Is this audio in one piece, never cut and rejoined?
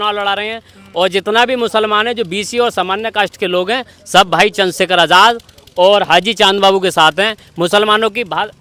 yes; 0 cuts

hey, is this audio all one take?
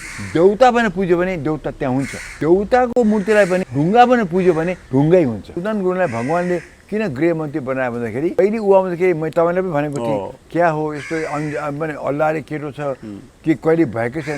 no; 5 cuts; at 2.3 s, 3.7 s, 4.8 s, 5.5 s, 8.4 s

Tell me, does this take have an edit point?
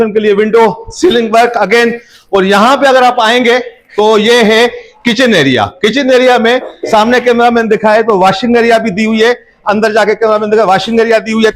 no; 0 cuts

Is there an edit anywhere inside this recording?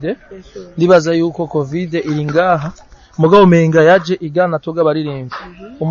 no; 0 cuts

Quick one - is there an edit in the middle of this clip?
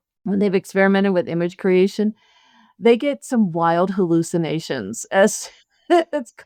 no; 0 cuts

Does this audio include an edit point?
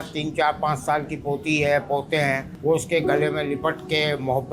yes; 1 cut; at 2.5 s

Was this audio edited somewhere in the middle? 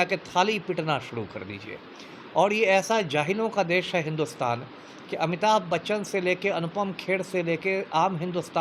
no; 0 cuts

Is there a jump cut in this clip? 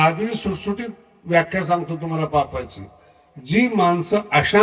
no; 0 cuts

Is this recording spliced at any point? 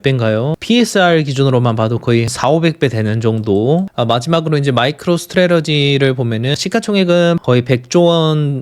yes; 4 cuts; at 2.3 s, 3.9 s, 6.5 s, 7.4 s

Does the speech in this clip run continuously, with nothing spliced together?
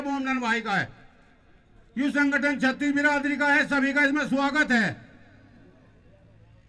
yes; 0 cuts

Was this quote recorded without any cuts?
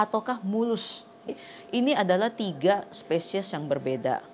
no; 1 cut; at 1.3 s

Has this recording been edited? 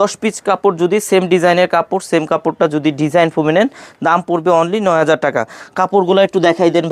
no; 0 cuts

